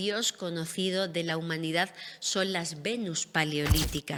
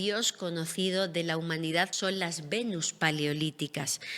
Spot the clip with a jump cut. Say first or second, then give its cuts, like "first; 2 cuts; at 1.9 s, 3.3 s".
second; 1 cut; at 1.9 s